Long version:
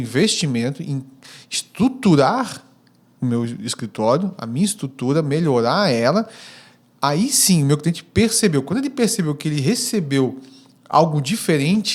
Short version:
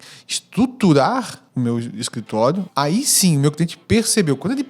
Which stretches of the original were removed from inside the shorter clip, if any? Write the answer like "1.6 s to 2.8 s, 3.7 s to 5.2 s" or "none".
2.6 s to 3.0 s, 4.3 s to 6.9 s

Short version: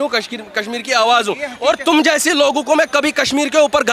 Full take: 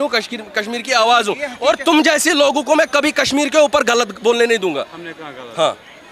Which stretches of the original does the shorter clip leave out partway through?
none

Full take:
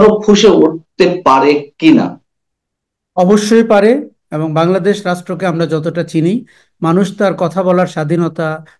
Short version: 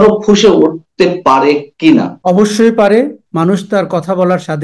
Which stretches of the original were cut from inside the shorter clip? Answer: 2.1 s to 3.1 s, 4.1 s to 6.7 s

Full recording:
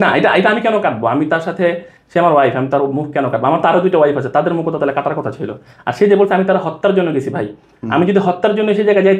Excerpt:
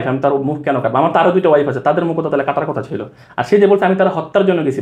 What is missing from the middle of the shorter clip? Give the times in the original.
none

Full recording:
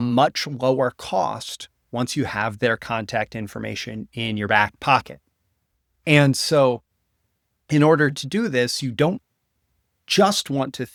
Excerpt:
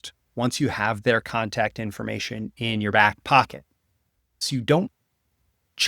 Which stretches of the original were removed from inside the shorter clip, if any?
6.0 s to 8.7 s

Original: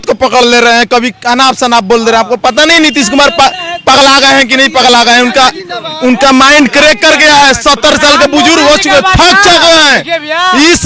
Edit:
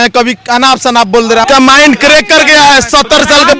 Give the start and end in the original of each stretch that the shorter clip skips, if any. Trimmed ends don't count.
2.2 s to 6.2 s

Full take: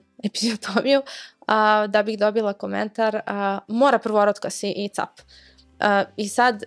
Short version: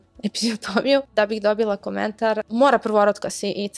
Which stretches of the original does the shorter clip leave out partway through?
1.1 s to 1.9 s, 3.2 s to 3.7 s

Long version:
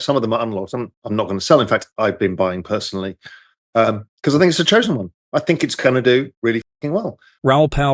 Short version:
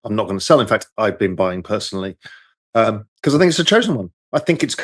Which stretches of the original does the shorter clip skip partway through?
none

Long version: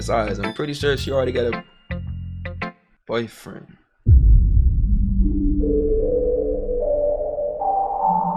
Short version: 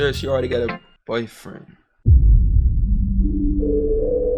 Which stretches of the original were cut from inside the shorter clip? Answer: 1.7 s to 2.9 s

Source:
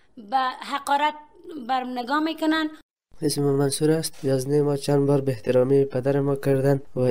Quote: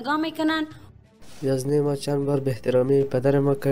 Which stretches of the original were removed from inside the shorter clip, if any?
3.2 s to 4.0 s

